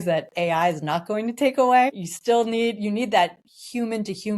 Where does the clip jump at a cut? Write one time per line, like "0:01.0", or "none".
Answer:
0:02.1